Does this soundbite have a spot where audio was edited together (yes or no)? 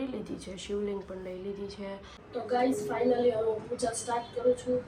yes